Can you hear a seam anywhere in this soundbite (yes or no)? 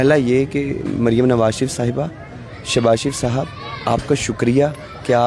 no